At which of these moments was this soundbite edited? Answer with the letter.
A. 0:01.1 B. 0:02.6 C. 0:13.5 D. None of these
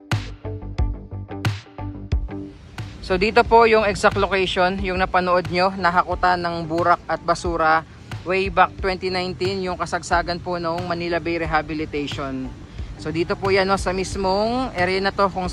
B